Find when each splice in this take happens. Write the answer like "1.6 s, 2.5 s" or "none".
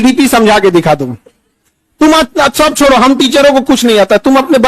none